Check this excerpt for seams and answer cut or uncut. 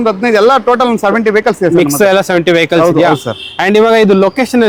uncut